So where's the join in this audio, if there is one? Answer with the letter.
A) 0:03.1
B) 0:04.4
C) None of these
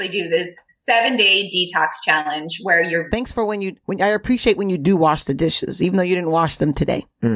A